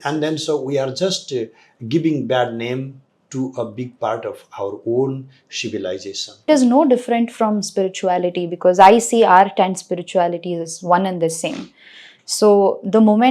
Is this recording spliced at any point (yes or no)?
yes